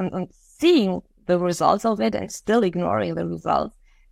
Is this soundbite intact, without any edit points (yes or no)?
yes